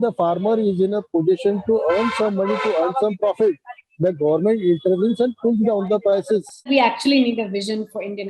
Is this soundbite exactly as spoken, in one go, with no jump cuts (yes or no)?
no